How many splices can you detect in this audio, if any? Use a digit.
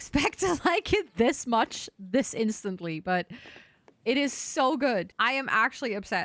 1